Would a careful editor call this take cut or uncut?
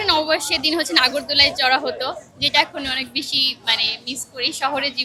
uncut